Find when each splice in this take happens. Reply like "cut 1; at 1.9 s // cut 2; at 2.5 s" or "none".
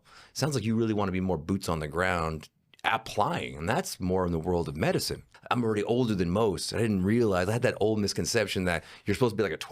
cut 1; at 5.3 s

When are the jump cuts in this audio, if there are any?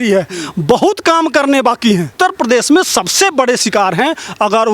cut 1; at 2.1 s

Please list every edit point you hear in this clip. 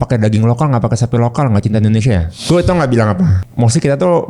cut 1; at 2.3 s // cut 2; at 3.4 s

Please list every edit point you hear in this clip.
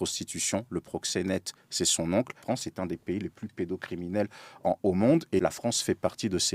cut 1; at 2.4 s // cut 2; at 5.4 s

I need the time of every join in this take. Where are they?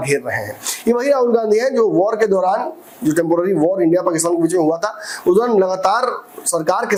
none

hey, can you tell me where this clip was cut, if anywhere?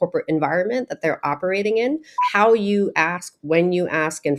cut 1; at 2.1 s

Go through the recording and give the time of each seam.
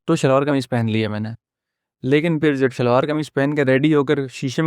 cut 1; at 1.5 s

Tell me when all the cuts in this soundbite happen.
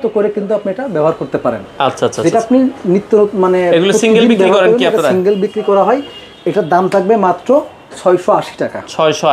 none

